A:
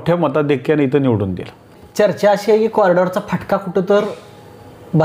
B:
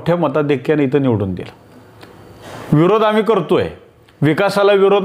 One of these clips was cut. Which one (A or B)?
A